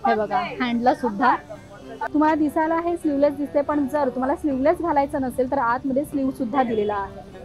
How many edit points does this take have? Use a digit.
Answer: 1